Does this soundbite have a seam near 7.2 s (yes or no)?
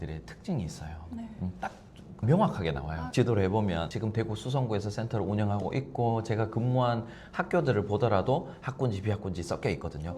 no